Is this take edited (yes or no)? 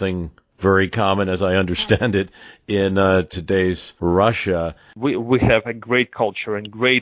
yes